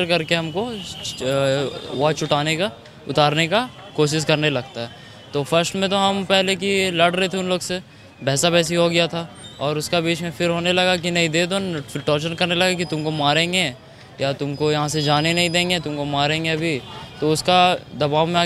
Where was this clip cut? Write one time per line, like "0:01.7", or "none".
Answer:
none